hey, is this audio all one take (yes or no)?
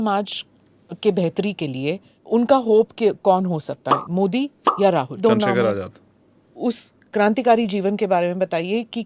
no